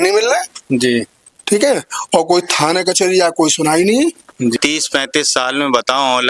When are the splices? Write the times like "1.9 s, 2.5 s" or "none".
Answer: 4.5 s